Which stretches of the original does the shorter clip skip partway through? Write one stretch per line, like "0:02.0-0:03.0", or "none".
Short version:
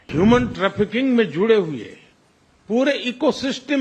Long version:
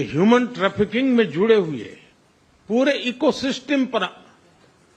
none

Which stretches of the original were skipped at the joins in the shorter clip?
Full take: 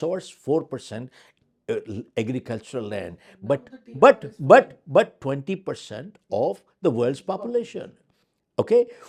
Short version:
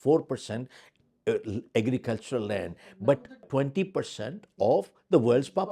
0:03.9-0:05.2

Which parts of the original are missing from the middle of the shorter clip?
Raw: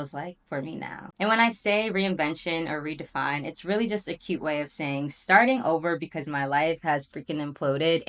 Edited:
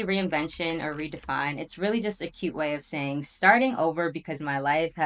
none

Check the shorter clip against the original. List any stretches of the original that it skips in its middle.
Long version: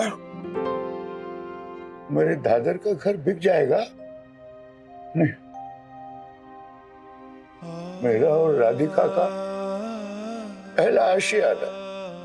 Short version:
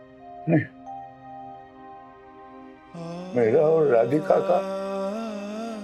none

